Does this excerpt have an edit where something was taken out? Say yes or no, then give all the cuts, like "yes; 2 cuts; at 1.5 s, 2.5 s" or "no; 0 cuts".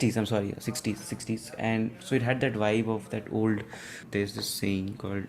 yes; 1 cut; at 4.0 s